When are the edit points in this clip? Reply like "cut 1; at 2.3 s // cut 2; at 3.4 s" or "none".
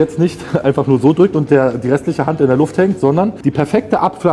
cut 1; at 3.4 s